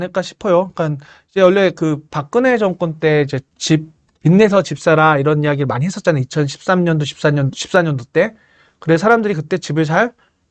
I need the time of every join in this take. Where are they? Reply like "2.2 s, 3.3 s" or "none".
none